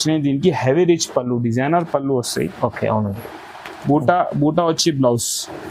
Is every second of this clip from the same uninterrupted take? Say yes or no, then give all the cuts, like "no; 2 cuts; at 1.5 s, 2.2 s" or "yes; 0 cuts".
yes; 0 cuts